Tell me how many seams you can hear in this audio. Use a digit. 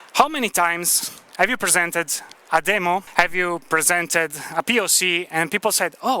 1